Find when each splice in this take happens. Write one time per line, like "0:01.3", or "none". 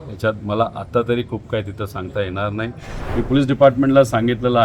0:03.0